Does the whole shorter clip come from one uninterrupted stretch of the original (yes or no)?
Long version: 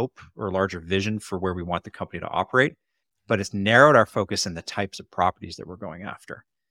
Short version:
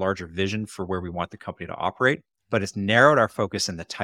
no